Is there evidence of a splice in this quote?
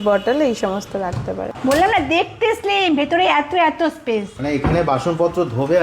yes; 1 cut; at 1.5 s

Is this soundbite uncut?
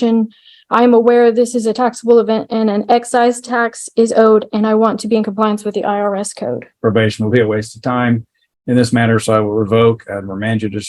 no; 1 cut; at 6.7 s

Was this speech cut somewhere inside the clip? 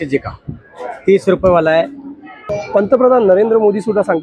yes; 1 cut; at 2.4 s

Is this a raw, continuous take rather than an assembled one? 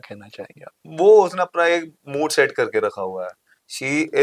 yes; 0 cuts

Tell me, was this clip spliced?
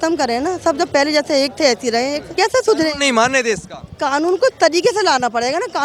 yes; 1 cut; at 2.2 s

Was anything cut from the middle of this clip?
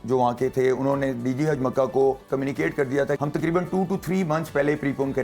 yes; 1 cut; at 3.2 s

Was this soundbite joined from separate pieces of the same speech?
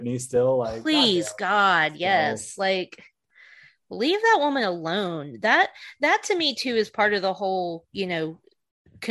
no; 0 cuts

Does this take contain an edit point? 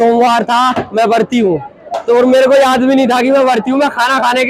no; 0 cuts

